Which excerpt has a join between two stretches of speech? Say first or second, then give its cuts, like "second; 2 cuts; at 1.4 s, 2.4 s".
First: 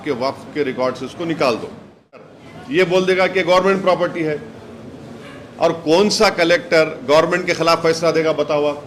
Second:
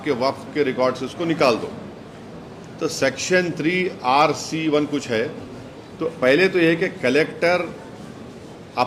first; 1 cut; at 2.6 s